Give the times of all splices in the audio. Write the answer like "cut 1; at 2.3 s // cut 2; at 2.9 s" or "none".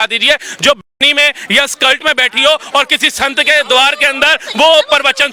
none